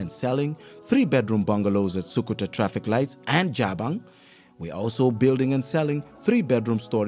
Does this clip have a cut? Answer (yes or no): no